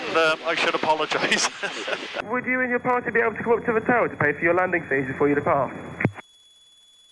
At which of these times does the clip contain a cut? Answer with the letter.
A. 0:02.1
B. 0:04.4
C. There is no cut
A